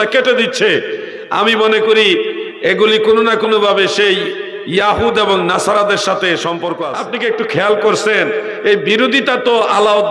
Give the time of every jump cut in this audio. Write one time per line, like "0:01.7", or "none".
0:06.9